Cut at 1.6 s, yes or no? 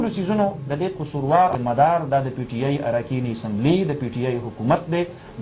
yes